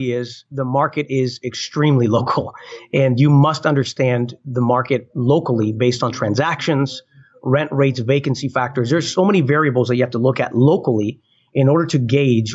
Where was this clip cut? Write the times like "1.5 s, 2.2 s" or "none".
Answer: none